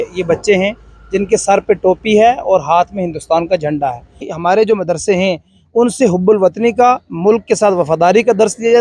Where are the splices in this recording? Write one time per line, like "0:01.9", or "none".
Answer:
0:04.3